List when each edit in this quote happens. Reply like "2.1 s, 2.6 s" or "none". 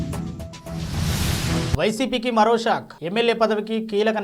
none